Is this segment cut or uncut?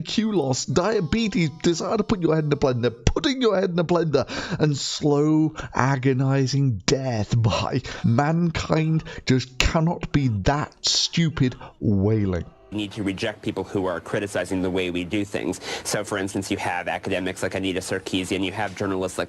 cut